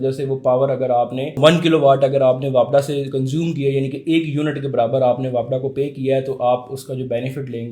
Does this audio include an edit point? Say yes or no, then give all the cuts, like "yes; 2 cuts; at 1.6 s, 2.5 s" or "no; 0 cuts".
yes; 1 cut; at 1.4 s